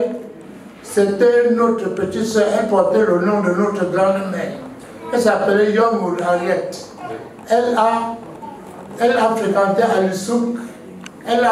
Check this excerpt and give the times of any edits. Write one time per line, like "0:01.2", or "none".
none